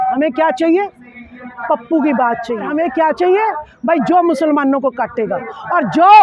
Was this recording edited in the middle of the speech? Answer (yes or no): yes